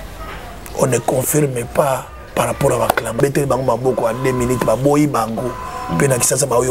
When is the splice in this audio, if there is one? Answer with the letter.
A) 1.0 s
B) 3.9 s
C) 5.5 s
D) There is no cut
D